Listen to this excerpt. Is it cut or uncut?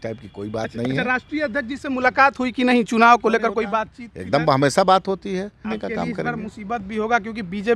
cut